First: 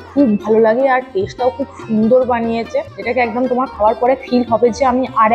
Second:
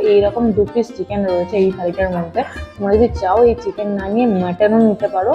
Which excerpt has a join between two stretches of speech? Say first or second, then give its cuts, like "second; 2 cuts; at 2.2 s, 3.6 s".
first; 1 cut; at 2.9 s